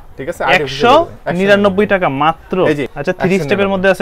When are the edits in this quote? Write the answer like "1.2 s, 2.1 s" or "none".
2.9 s